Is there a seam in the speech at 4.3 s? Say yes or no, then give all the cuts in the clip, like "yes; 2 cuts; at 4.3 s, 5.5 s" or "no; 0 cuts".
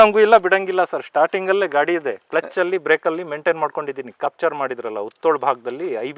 yes; 1 cut; at 4.3 s